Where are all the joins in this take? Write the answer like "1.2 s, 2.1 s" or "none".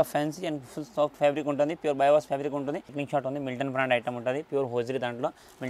3.0 s

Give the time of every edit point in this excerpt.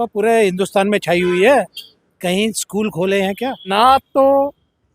3.7 s

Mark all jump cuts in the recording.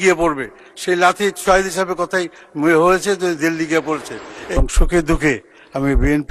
4.6 s

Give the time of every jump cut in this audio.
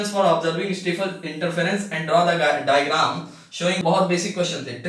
3.8 s

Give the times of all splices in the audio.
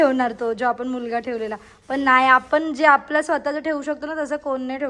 none

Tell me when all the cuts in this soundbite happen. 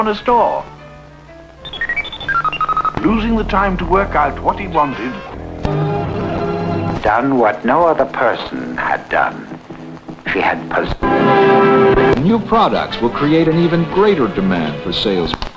none

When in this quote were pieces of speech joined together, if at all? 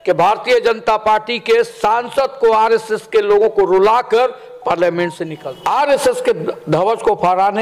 5.3 s

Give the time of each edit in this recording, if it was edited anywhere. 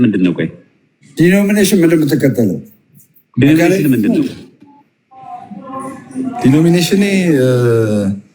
none

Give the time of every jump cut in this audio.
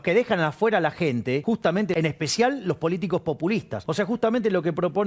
1.7 s, 3.8 s

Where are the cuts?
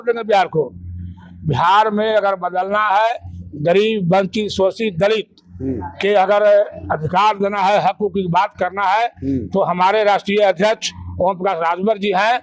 none

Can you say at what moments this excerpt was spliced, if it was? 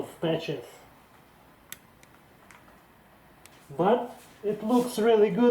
1.0 s, 3.6 s, 4.2 s

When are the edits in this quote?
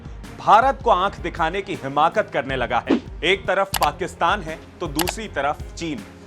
3.0 s

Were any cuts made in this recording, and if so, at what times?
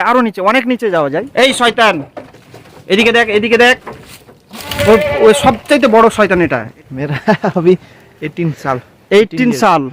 1.3 s, 6.7 s

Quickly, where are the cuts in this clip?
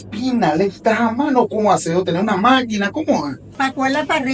3.4 s

